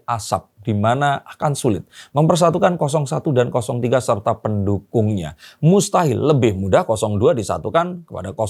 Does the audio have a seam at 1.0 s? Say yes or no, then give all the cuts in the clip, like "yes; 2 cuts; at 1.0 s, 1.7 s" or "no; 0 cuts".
no; 0 cuts